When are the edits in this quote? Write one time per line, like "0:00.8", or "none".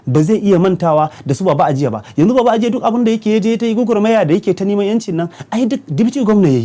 none